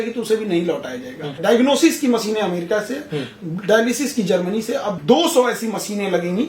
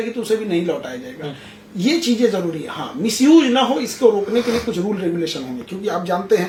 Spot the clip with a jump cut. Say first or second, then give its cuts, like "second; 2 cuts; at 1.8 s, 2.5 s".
first; 2 cuts; at 1.4 s, 5.0 s